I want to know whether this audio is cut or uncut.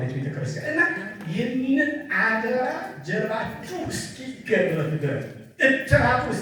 uncut